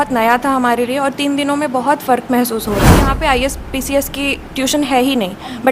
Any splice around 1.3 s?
no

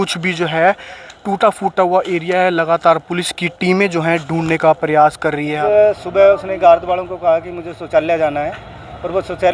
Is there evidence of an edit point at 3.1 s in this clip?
no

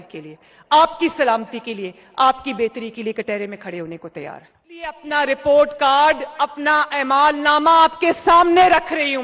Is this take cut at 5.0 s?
yes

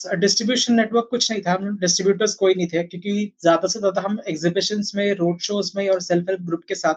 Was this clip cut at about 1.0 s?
no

